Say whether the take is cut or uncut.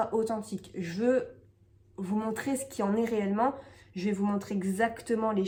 uncut